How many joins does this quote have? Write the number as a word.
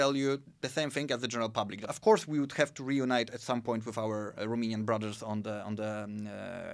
one